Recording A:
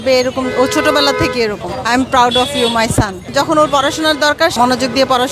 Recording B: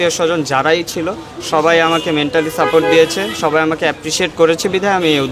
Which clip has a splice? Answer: A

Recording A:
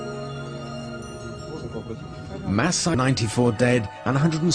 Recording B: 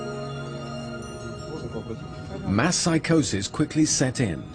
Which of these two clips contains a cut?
B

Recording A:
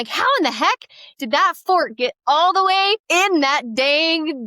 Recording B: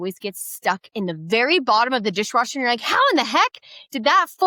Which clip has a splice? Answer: A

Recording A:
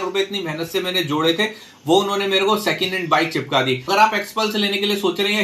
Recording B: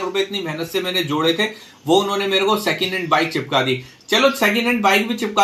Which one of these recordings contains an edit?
A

